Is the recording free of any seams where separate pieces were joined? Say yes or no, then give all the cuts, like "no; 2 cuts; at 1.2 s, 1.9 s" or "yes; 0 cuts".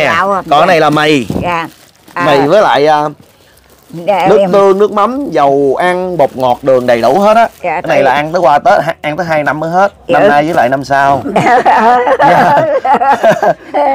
yes; 0 cuts